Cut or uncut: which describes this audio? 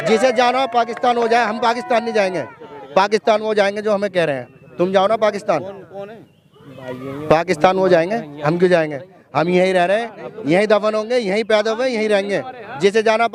uncut